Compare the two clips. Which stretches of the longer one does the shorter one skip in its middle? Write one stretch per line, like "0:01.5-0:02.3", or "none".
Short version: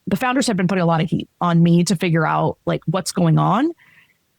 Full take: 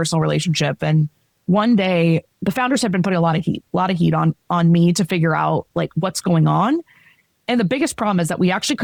0:03.6-0:04.4